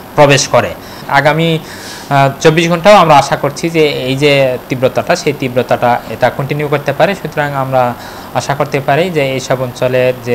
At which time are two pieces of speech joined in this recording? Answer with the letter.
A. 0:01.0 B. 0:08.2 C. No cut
A